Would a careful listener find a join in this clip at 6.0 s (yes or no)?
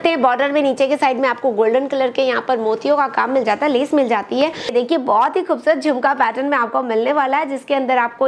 no